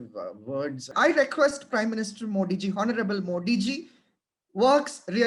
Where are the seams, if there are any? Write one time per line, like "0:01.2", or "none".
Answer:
0:00.9